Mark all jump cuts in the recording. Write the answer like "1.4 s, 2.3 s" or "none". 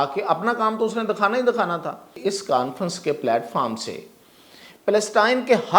2.1 s